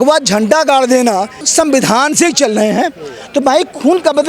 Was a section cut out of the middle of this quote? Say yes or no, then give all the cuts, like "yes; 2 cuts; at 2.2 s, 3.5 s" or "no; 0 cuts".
yes; 1 cut; at 1.4 s